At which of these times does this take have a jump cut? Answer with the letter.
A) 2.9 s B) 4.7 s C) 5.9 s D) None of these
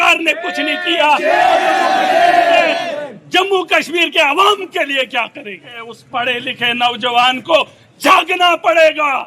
C